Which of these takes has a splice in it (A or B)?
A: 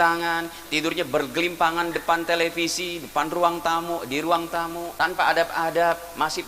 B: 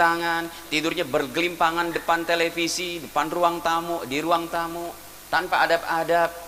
A